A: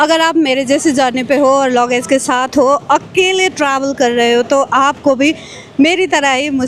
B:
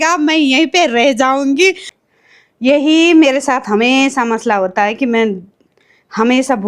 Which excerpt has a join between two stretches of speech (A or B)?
B